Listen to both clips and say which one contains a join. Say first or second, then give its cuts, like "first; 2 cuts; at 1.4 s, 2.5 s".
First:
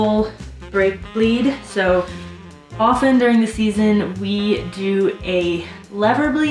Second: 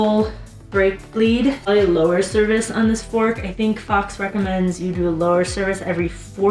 second; 1 cut; at 1.7 s